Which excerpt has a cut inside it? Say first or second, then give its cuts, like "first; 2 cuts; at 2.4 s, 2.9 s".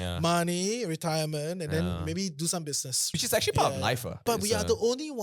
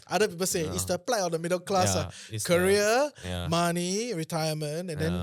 first; 2 cuts; at 2.9 s, 4.2 s